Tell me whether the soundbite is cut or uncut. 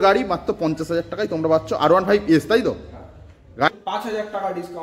cut